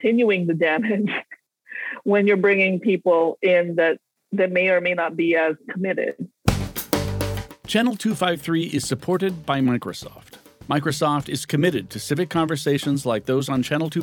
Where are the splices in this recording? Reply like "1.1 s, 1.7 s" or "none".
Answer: 4.1 s, 6.4 s